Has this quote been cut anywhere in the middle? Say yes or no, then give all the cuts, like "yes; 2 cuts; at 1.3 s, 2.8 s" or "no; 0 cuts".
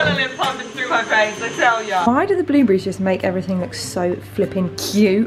yes; 1 cut; at 2.0 s